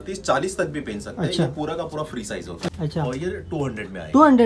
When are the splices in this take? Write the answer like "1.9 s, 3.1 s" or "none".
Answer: 2.7 s